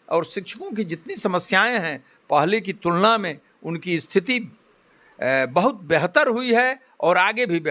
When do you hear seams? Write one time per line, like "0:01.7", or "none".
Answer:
none